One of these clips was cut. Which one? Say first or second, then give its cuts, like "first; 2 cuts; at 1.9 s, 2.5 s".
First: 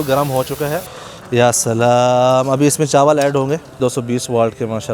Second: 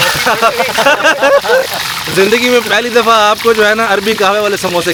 first; 2 cuts; at 0.9 s, 3.8 s